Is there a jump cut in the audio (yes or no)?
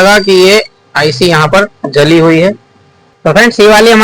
yes